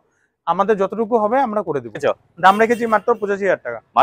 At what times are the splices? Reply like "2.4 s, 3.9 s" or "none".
2.0 s